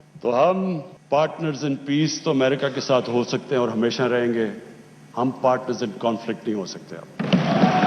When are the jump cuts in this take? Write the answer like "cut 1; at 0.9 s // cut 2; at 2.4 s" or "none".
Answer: cut 1; at 0.9 s